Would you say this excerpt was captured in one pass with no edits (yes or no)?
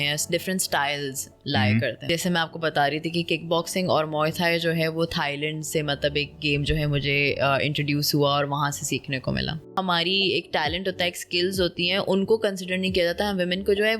no